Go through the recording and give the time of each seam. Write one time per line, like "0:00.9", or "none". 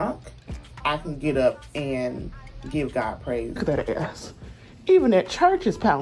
0:03.6